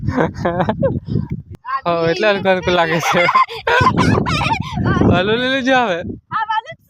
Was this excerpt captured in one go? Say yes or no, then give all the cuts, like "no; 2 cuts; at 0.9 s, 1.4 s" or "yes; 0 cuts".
no; 1 cut; at 1.4 s